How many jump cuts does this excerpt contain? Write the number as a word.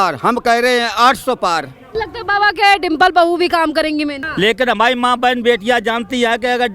two